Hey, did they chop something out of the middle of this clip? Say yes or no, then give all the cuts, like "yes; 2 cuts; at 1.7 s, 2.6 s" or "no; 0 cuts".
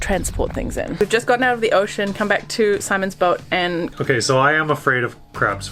yes; 2 cuts; at 1.0 s, 3.9 s